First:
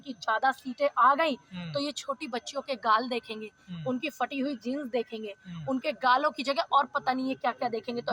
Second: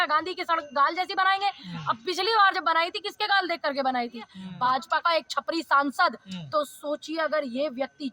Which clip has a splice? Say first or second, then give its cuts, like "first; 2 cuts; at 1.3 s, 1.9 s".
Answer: second; 1 cut; at 4.4 s